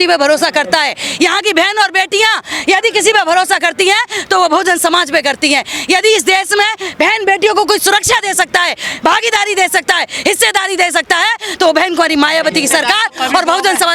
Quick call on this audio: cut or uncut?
uncut